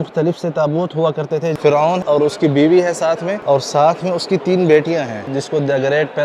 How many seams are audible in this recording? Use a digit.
3